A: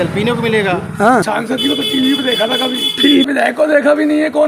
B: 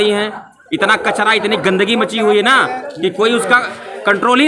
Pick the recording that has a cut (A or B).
A